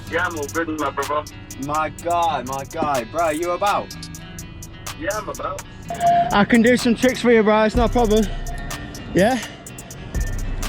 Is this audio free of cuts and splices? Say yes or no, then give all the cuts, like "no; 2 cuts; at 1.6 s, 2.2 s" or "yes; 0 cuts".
no; 1 cut; at 5.9 s